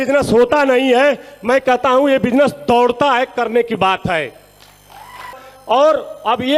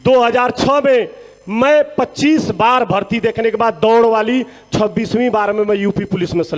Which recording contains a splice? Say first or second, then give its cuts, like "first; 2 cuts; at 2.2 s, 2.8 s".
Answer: first; 1 cut; at 5.5 s